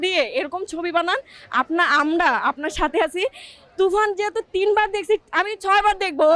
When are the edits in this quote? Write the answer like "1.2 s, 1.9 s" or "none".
5.2 s